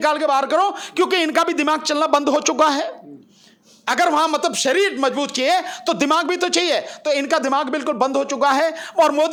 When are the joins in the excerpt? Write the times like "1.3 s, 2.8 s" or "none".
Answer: none